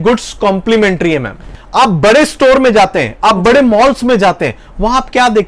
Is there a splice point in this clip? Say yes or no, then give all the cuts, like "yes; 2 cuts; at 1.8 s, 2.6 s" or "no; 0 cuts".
yes; 1 cut; at 1.6 s